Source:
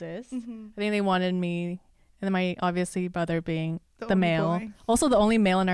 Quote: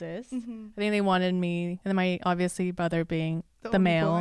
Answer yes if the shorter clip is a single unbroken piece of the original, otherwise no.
no